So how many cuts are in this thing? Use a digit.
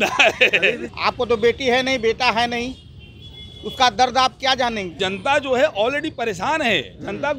2